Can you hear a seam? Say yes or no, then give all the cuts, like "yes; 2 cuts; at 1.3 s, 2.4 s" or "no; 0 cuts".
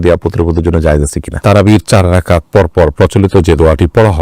yes; 1 cut; at 1.4 s